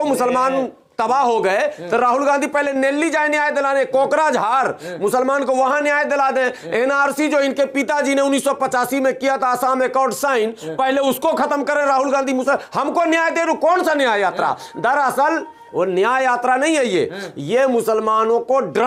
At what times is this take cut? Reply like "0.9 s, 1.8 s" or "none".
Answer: none